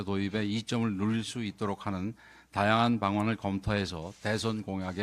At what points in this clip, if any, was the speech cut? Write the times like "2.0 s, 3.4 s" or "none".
none